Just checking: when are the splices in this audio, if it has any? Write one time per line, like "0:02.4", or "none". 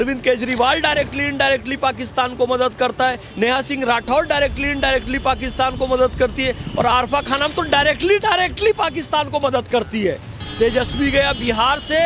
0:10.4